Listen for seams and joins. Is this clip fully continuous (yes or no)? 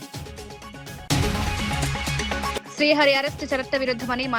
no